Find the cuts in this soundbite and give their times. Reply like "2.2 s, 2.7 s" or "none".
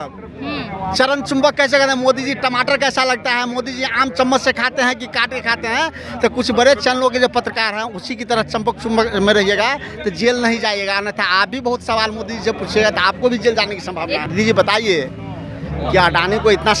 14.3 s